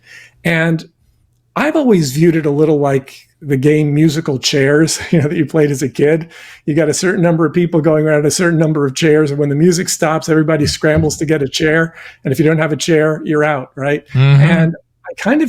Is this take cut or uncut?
uncut